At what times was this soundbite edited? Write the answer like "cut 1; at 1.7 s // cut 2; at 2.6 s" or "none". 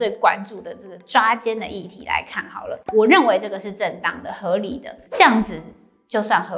cut 1; at 2.8 s